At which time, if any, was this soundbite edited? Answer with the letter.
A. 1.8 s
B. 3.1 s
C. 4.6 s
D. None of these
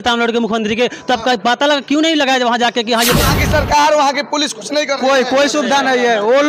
B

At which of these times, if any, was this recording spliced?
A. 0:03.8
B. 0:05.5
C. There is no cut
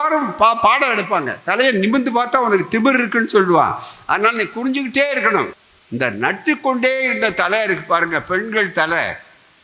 B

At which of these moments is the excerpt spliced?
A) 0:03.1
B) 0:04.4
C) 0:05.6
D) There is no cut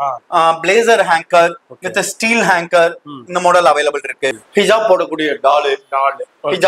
B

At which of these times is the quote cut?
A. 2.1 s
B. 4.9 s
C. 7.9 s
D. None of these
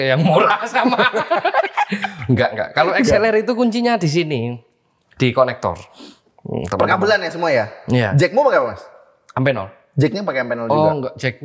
D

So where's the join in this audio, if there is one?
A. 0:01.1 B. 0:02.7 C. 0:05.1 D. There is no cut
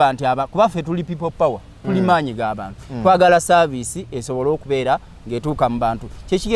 D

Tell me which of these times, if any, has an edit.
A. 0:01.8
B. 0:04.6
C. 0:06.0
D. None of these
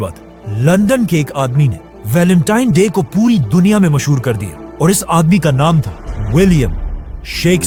D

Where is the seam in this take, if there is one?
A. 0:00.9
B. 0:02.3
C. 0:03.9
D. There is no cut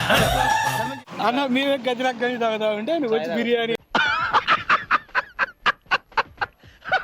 A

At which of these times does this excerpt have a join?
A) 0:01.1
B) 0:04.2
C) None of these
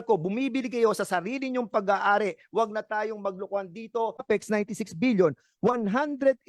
B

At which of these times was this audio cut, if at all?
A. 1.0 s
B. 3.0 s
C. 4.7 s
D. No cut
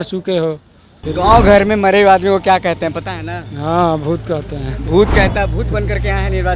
A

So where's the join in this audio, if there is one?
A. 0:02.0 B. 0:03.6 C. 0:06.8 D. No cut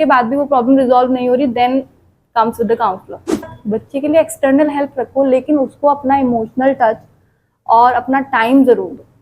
B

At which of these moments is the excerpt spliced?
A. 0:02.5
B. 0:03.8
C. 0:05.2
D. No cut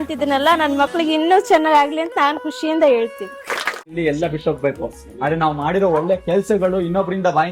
B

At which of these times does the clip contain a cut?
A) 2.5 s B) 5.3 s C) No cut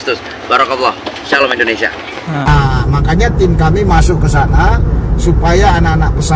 A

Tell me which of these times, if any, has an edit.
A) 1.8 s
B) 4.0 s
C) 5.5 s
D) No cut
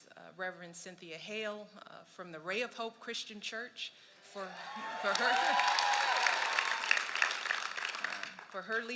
B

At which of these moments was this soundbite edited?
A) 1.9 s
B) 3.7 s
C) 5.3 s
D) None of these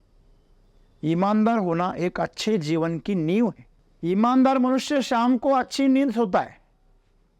D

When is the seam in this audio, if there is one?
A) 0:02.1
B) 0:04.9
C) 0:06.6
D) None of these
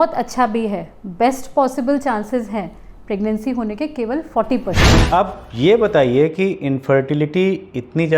B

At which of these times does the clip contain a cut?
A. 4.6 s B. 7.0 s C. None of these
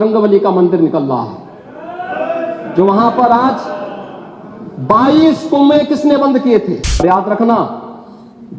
B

